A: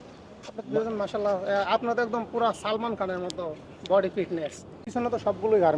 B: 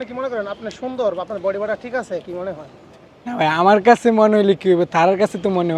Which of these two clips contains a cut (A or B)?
A